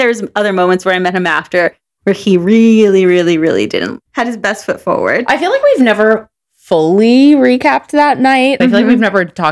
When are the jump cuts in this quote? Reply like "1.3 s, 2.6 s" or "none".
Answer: 8.6 s